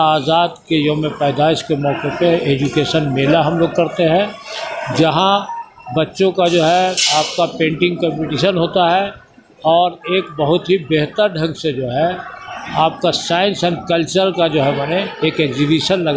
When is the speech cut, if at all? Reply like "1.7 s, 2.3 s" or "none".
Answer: none